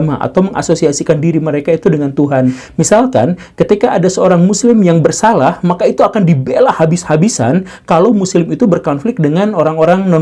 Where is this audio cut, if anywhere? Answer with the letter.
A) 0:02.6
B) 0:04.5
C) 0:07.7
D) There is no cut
A